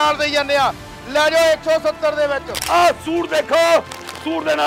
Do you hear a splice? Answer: yes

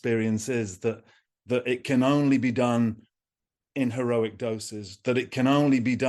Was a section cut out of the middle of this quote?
no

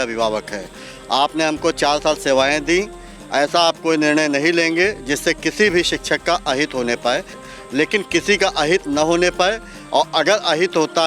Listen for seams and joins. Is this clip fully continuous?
no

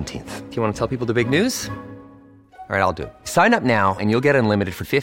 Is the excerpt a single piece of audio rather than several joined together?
yes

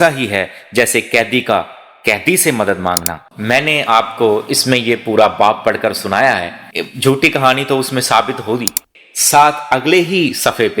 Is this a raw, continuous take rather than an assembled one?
no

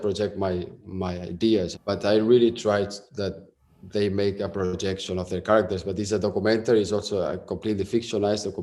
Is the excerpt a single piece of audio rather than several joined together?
no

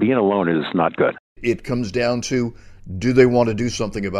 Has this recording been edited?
yes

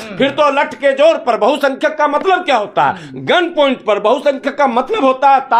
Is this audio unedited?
yes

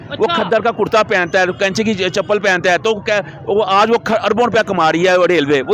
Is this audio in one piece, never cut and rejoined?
yes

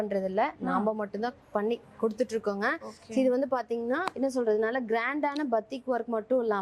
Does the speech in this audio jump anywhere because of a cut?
no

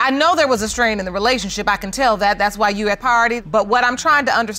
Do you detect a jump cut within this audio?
no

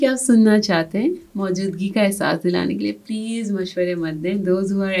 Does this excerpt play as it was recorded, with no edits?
yes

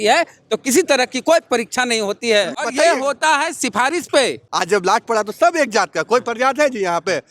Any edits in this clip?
yes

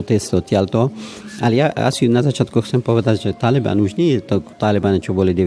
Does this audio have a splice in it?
no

